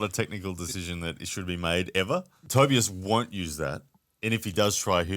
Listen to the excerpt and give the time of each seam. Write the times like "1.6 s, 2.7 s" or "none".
2.4 s